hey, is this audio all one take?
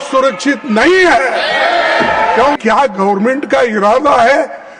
no; 1 cut; at 2.6 s

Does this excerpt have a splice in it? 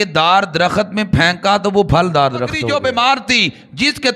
yes; 1 cut; at 2.6 s

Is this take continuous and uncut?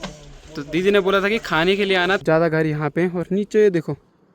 no; 1 cut; at 2.2 s

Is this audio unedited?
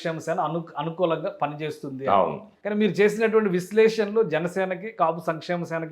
no; 1 cut; at 2.5 s

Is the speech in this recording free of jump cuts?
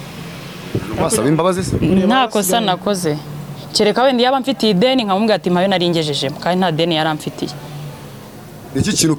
yes; 0 cuts

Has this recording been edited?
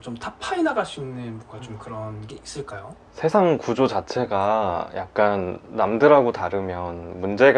no; 0 cuts

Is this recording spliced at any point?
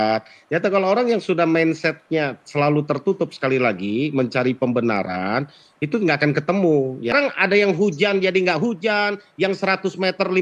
yes; 1 cut; at 7.1 s

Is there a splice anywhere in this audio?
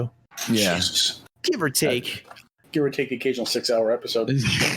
yes; 1 cut; at 2.5 s

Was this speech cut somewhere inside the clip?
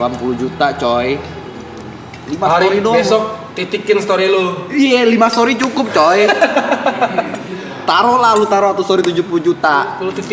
no; 0 cuts

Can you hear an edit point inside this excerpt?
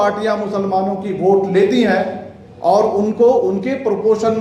no; 0 cuts

